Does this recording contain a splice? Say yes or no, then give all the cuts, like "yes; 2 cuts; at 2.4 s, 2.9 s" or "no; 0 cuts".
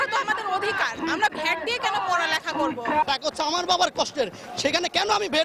yes; 1 cut; at 3.1 s